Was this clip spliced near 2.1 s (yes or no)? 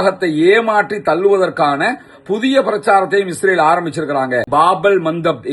no